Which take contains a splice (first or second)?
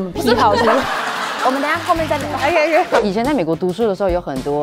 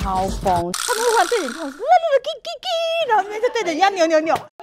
first